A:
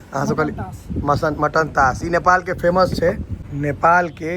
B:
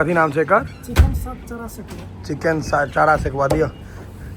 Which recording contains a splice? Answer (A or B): A